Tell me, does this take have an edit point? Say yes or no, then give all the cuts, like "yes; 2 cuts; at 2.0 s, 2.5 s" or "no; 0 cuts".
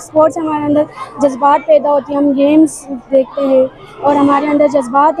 no; 0 cuts